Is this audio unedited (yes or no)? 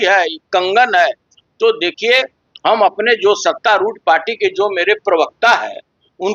yes